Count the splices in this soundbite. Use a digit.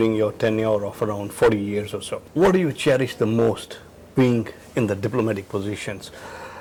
0